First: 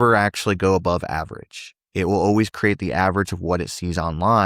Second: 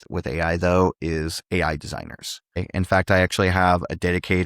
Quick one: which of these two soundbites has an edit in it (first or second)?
second